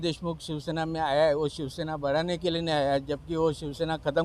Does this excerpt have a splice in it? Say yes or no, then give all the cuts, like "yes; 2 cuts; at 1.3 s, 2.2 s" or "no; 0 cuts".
no; 0 cuts